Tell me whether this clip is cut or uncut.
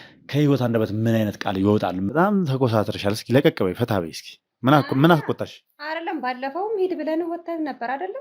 cut